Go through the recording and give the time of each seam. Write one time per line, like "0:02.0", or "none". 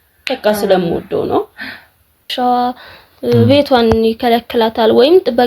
0:02.3